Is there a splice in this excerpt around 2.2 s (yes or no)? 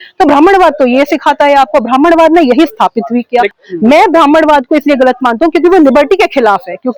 no